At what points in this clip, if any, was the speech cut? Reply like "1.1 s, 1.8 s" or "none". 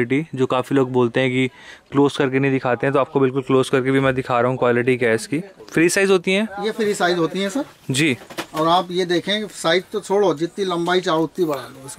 5.6 s